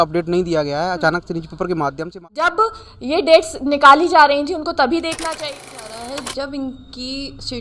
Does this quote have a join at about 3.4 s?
no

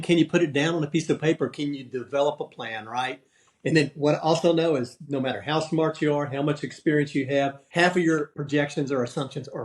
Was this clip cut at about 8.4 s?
yes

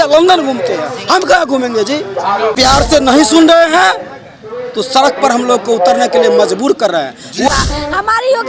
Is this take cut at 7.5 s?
yes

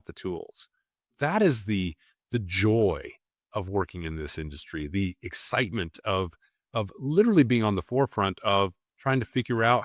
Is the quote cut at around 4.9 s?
no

